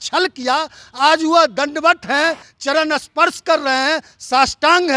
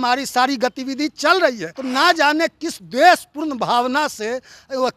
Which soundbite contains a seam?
second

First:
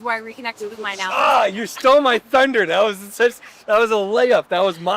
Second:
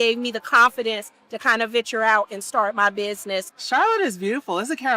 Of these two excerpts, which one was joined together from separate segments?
second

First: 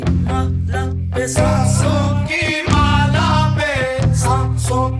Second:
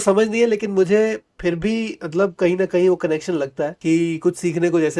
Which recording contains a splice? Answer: second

